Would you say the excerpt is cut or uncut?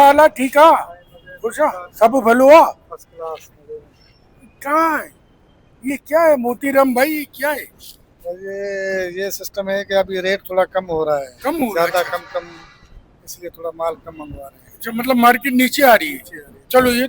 uncut